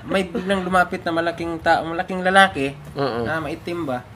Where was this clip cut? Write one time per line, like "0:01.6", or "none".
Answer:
none